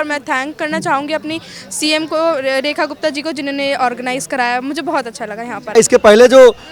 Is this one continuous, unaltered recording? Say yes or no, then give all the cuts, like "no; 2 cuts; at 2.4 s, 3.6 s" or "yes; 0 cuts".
no; 1 cut; at 5.8 s